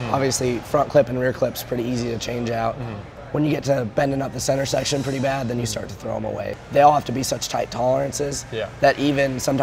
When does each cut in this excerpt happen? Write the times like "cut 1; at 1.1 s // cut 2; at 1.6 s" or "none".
cut 1; at 6.6 s